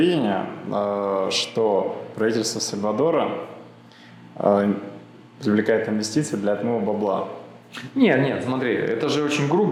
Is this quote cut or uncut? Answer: uncut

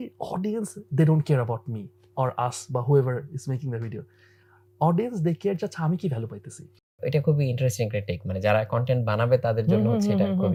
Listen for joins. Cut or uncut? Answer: uncut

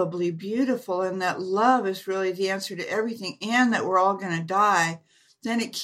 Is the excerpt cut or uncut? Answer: uncut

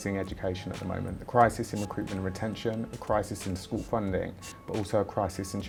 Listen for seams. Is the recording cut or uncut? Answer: uncut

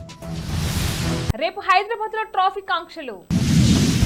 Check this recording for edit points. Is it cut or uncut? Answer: uncut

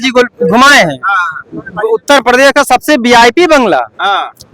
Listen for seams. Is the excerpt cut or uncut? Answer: uncut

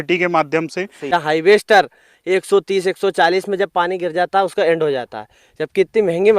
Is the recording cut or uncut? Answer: cut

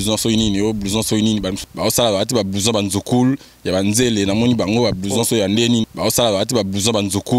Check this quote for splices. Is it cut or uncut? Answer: cut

